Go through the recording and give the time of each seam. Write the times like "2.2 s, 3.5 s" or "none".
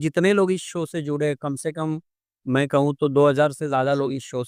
none